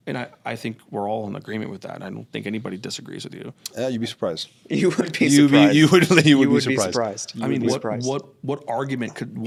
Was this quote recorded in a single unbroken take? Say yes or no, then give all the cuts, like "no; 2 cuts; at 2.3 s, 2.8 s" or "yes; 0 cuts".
yes; 0 cuts